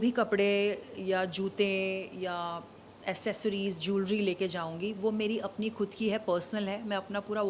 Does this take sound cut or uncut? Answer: uncut